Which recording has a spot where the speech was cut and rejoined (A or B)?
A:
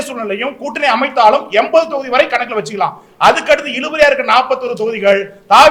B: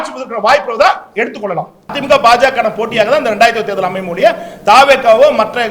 B